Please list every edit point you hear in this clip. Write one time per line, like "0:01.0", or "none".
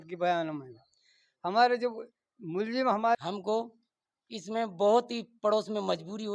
0:03.2